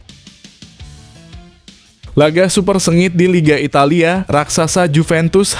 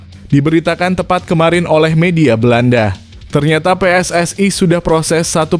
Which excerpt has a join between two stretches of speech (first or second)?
first